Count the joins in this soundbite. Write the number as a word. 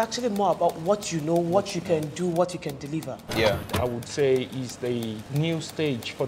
two